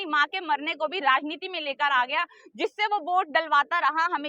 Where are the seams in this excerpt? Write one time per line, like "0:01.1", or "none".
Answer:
none